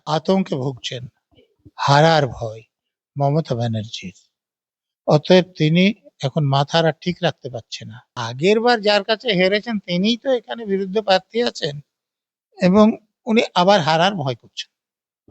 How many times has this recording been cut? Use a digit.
1